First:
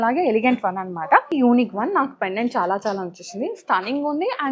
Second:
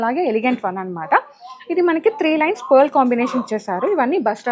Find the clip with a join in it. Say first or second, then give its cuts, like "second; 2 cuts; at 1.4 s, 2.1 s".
first; 1 cut; at 1.3 s